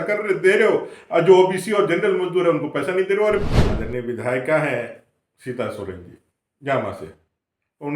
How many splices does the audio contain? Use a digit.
1